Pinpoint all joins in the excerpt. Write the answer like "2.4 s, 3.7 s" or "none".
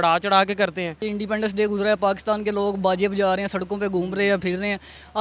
1.0 s